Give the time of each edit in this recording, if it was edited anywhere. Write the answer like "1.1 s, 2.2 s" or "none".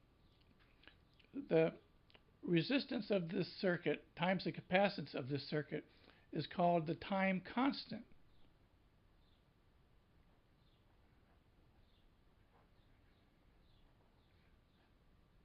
none